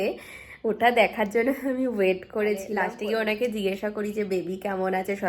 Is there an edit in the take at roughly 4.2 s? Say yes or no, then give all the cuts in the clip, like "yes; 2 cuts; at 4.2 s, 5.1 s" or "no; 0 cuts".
no; 1 cut; at 2.9 s